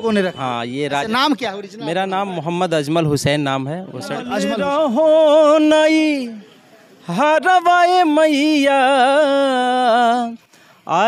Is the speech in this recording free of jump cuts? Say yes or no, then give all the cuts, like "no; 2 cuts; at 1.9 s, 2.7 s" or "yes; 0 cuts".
no; 1 cut; at 4.5 s